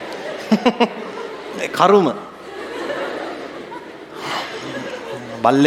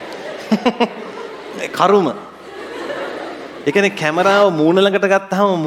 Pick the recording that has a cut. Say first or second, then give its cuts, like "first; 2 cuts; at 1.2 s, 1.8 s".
second; 1 cut; at 3.6 s